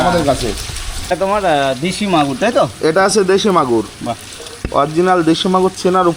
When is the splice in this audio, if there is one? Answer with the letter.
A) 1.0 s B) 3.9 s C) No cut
A